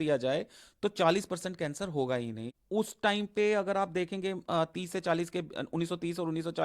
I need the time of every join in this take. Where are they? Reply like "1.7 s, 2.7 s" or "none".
2.4 s